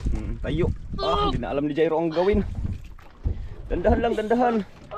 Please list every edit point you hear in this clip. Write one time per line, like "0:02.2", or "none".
none